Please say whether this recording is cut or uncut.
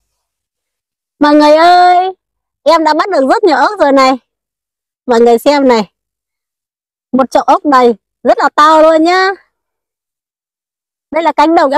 uncut